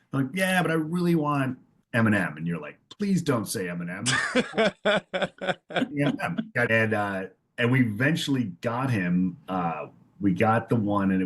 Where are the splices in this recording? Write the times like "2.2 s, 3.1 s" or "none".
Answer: 6.7 s

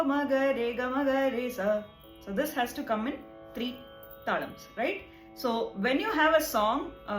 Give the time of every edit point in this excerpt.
5.2 s

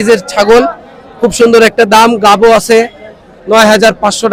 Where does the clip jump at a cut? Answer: none

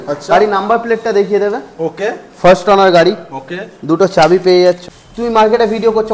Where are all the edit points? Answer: 4.9 s

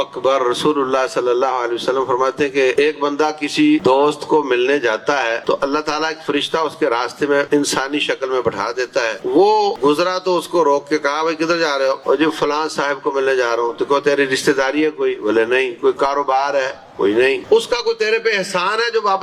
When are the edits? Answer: 2.7 s, 3.8 s, 5.4 s, 7.5 s, 9.2 s, 9.8 s, 12.0 s, 17.4 s

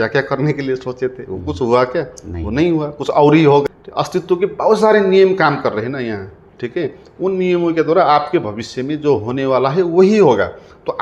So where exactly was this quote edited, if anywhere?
3.7 s

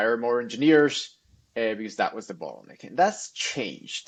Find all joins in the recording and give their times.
none

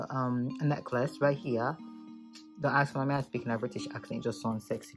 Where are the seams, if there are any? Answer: none

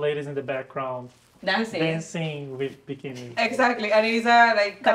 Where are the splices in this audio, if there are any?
none

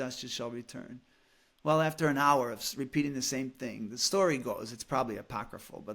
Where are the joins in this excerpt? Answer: none

